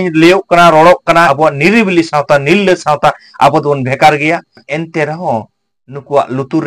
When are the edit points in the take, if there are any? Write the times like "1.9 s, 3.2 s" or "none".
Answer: 1.3 s, 4.6 s